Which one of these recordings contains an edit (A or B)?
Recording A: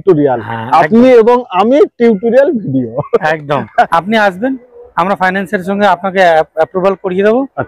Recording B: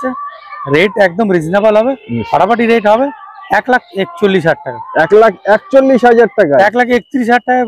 A